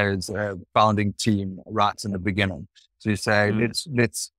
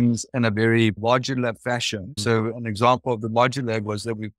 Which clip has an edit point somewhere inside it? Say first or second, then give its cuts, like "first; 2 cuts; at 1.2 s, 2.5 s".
second; 2 cuts; at 1.0 s, 2.2 s